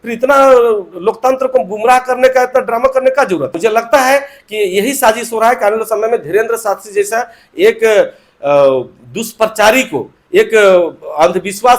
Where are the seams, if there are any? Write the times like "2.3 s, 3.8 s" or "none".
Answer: 3.5 s